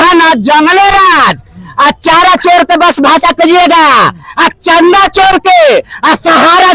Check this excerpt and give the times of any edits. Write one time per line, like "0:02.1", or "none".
none